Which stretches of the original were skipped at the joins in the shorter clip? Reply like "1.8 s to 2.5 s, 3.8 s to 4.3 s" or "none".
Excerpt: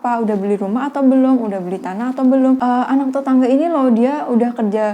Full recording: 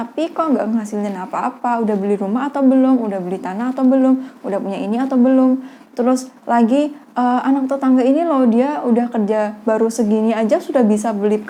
4.2 s to 7.2 s